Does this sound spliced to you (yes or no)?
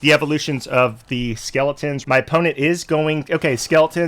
yes